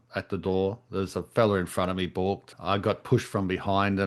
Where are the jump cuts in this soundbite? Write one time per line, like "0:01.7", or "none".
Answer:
0:02.5